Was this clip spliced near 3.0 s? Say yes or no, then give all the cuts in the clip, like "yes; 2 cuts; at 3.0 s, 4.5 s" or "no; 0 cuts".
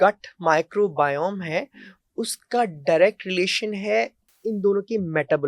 no; 1 cut; at 4.2 s